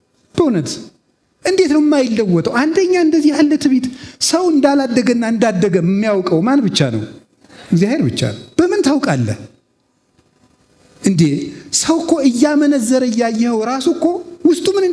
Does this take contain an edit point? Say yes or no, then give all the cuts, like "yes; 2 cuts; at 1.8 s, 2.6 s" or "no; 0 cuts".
no; 0 cuts